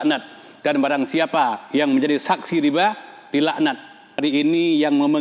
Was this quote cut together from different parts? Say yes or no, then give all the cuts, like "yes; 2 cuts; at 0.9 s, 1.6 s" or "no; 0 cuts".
yes; 1 cut; at 4.2 s